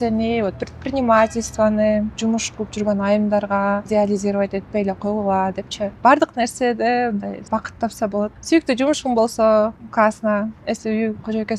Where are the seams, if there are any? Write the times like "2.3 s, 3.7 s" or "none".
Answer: 2.2 s, 3.9 s, 5.9 s, 7.4 s, 8.4 s, 9.8 s

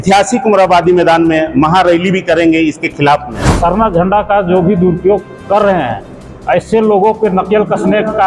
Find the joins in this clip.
3.5 s

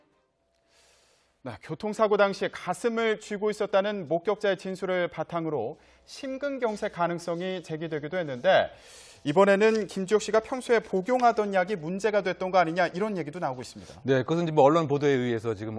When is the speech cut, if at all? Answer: none

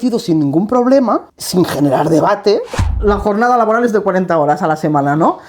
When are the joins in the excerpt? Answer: 1.4 s, 2.8 s

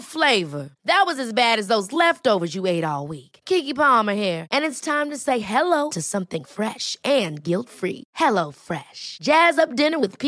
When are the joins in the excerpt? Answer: none

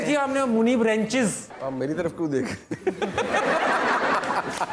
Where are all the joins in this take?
1.5 s

